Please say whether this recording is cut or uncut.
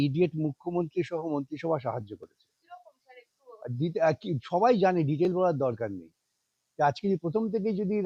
uncut